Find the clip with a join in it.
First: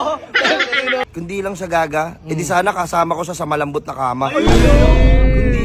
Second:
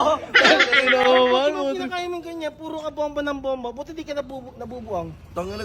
first; 1 cut; at 1.0 s

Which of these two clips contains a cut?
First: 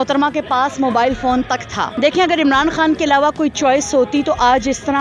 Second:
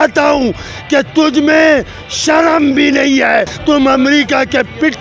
first; 1 cut; at 1.9 s

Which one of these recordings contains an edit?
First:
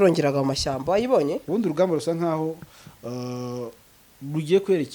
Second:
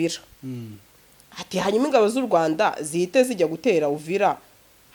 first; 1 cut; at 1.4 s

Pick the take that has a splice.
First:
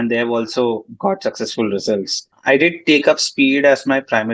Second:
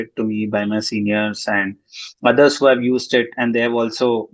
first; 1 cut; at 2.3 s

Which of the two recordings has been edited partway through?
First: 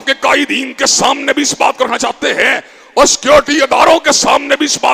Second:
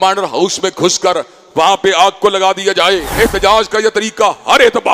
second; 1 cut; at 3.1 s

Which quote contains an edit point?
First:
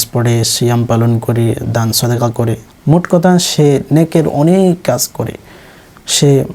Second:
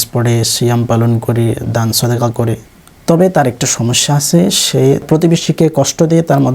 second; 2 cuts; at 2.7 s, 5.1 s

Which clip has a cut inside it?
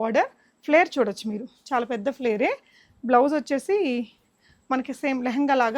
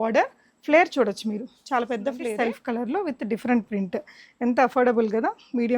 second; 1 cut; at 2.3 s

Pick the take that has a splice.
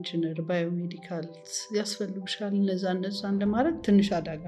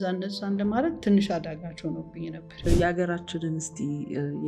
second; 1 cut; at 2.7 s

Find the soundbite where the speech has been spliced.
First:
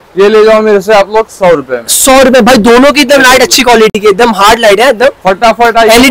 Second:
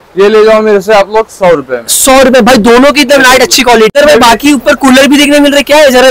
second; 1 cut; at 3.9 s

